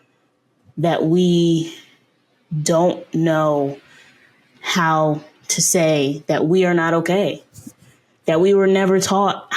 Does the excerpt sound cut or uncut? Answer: uncut